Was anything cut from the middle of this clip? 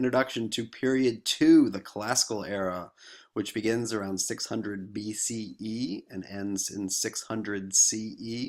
no; 0 cuts

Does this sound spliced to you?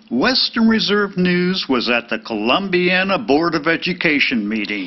no; 0 cuts

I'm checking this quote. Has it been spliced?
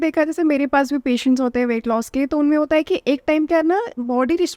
no; 0 cuts

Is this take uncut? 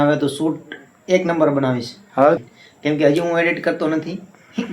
no; 1 cut; at 2.4 s

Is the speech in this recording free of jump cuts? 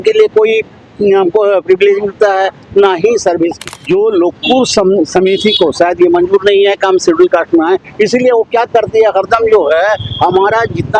no; 1 cut; at 3.7 s

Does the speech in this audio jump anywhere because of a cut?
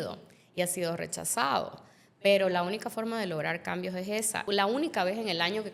yes; 1 cut; at 4.4 s

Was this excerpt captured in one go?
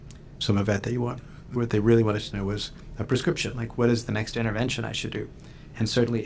no; 1 cut; at 1.3 s

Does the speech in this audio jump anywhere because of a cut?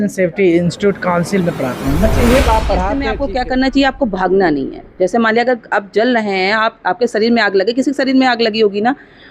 yes; 1 cut; at 3.1 s

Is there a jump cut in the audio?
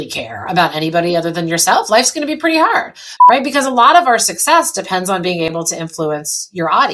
yes; 1 cut; at 3.0 s

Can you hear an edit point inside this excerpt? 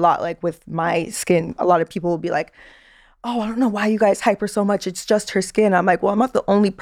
no; 0 cuts

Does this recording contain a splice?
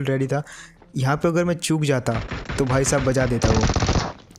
no; 0 cuts

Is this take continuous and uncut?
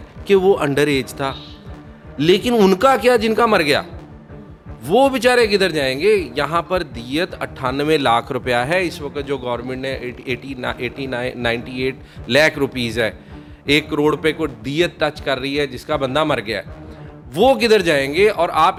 yes; 0 cuts

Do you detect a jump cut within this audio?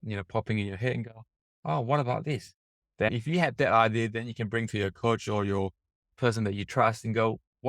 yes; 2 cuts; at 3.1 s, 6.1 s

